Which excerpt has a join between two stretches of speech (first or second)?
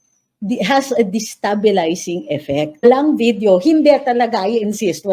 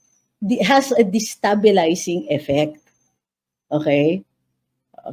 first